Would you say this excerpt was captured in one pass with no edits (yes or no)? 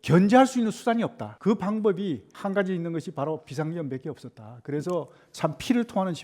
no